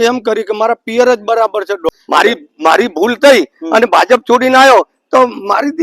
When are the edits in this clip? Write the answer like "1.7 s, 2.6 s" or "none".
1.9 s